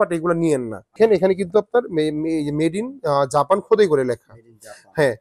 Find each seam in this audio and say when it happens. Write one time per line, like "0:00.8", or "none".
0:01.0